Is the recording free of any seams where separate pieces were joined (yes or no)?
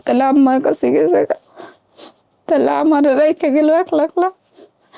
yes